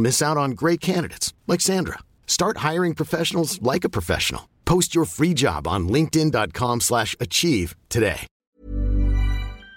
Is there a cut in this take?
yes; 1 cut; at 8.3 s

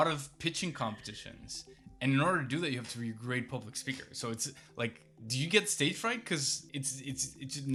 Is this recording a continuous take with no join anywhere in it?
yes; 0 cuts

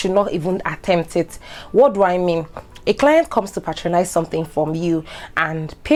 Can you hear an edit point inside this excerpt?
no; 0 cuts

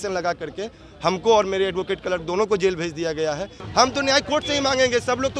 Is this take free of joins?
no; 1 cut; at 3.6 s

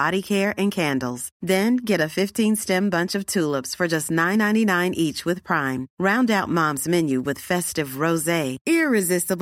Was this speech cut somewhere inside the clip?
no; 0 cuts

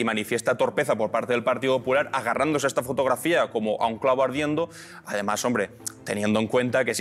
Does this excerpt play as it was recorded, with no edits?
yes; 0 cuts

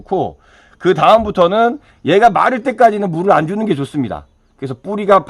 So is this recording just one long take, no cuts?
yes; 0 cuts

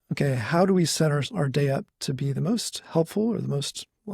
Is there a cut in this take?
no; 0 cuts

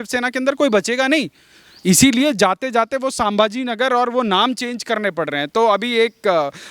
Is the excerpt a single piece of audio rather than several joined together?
yes; 0 cuts

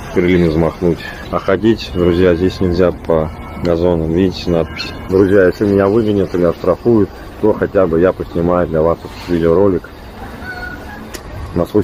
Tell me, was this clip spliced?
yes; 2 cuts; at 1.1 s, 5.1 s

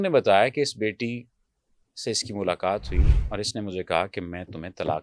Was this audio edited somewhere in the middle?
no; 0 cuts

